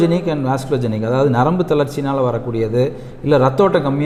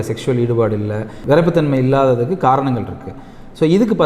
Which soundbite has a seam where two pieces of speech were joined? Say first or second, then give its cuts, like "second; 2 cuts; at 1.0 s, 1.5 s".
second; 1 cut; at 1.1 s